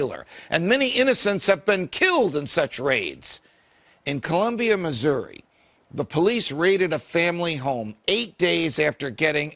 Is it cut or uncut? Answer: cut